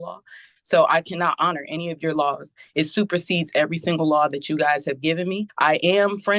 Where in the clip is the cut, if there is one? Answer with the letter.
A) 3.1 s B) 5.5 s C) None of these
B